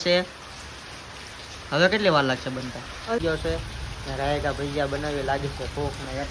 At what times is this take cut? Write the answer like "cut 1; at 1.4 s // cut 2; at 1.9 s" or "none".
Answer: cut 1; at 3.2 s